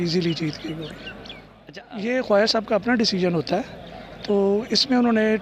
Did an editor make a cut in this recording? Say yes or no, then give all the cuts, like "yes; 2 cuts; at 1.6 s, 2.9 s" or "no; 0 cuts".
yes; 1 cut; at 1.3 s